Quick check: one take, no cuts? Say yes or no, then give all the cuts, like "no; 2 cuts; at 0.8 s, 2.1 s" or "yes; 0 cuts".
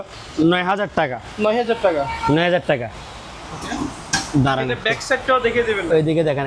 yes; 0 cuts